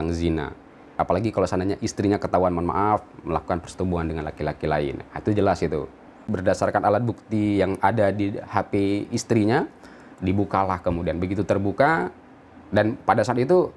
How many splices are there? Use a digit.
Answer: 2